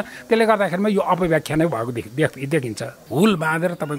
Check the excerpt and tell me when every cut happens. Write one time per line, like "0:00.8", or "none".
0:03.0

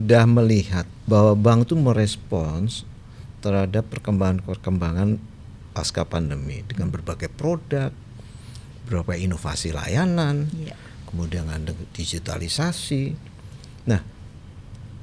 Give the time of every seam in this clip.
0:00.9

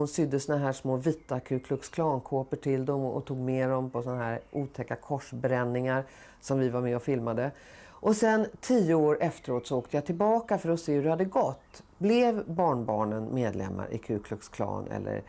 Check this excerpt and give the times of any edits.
none

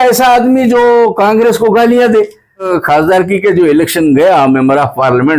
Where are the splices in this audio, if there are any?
0:02.7

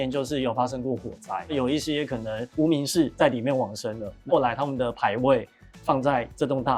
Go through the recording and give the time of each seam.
none

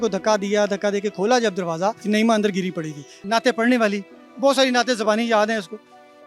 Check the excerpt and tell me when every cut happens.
0:02.0
0:03.2

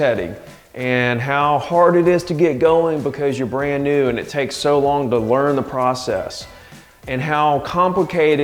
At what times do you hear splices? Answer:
none

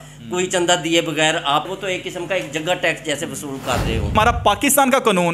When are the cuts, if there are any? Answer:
0:01.7
0:04.1

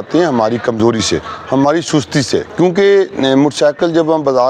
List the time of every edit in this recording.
0:02.5

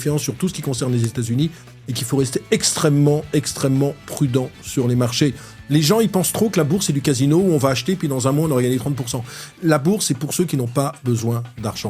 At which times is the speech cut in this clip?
0:05.5

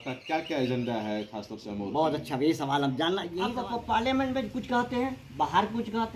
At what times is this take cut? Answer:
0:03.4

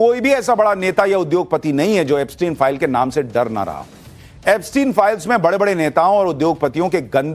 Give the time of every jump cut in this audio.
0:02.8

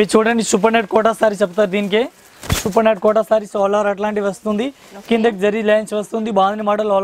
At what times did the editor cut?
none

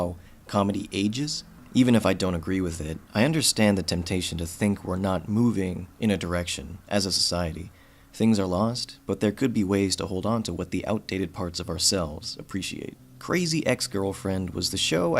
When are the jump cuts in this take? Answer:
0:01.6

